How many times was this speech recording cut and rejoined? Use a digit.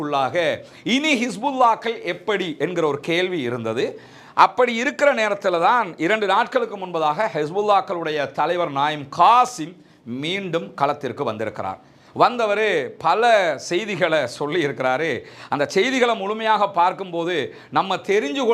0